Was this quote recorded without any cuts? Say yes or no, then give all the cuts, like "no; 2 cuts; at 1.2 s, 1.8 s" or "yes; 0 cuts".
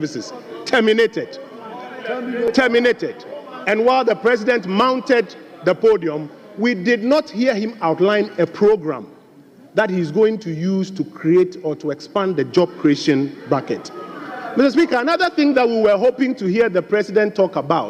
yes; 0 cuts